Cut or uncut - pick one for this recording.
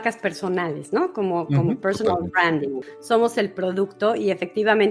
cut